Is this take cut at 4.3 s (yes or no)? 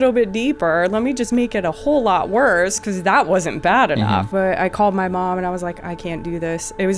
yes